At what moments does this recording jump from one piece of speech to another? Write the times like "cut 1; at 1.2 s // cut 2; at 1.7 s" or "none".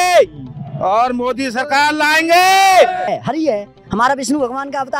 cut 1; at 3.1 s